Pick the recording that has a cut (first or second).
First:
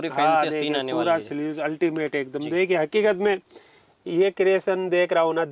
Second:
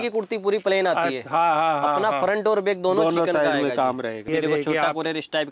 second